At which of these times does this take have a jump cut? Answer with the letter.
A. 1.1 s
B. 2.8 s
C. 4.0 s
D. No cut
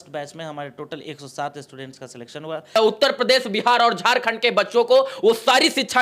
B